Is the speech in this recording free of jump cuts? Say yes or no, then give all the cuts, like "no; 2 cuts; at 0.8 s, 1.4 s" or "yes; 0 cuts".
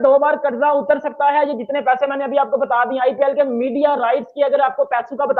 yes; 0 cuts